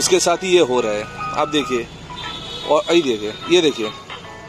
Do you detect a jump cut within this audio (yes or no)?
no